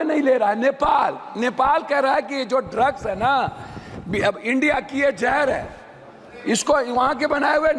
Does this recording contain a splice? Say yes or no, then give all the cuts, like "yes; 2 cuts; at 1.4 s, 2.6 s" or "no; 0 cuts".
no; 0 cuts